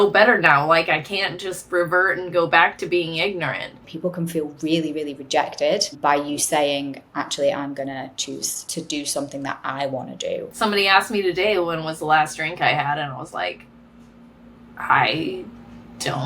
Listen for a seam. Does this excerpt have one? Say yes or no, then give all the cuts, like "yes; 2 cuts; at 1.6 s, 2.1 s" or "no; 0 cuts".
yes; 4 cuts; at 3.8 s, 6.0 s, 8.5 s, 10.5 s